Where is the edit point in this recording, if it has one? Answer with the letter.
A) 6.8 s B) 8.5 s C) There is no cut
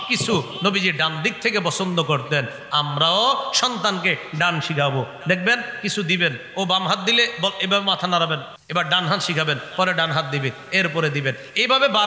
B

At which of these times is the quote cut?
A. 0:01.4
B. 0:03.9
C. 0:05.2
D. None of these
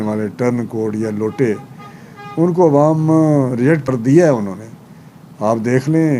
B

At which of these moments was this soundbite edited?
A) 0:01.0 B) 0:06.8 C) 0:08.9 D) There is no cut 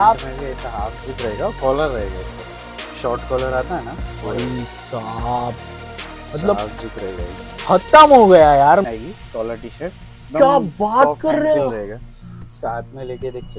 C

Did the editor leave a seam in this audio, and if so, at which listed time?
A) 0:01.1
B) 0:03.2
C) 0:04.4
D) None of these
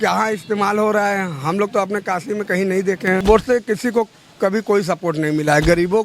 B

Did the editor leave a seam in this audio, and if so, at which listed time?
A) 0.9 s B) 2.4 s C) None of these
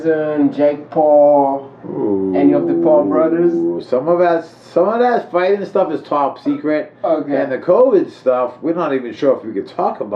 C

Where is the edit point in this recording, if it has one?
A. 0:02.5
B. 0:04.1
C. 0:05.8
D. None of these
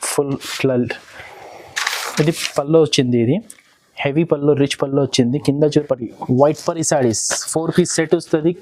C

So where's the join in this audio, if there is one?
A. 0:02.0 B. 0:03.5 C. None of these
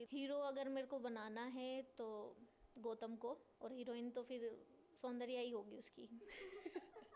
B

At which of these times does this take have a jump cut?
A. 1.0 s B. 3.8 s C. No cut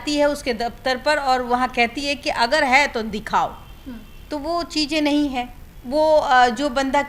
C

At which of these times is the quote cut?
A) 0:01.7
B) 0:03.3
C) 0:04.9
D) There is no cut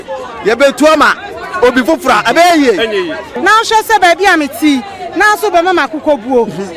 B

